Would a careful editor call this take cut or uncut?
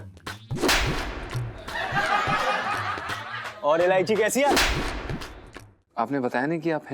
cut